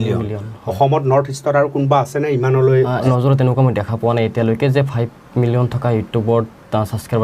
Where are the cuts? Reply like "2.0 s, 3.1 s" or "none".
3.0 s